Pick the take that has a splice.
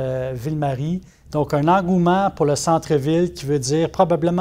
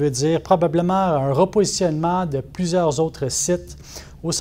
first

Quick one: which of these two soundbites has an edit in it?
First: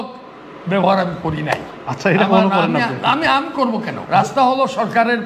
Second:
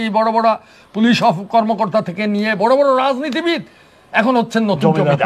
first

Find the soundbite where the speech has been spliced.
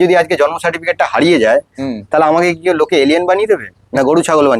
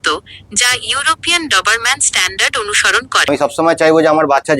second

